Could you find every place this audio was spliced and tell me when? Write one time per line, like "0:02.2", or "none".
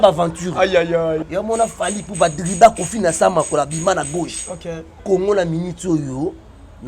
0:01.2
0:05.0